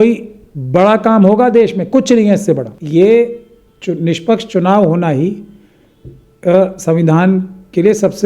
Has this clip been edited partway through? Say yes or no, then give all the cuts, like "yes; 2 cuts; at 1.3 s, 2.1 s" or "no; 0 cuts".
yes; 1 cut; at 2.7 s